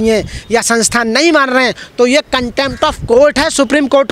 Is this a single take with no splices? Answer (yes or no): yes